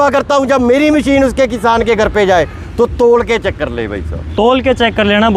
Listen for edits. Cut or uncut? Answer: uncut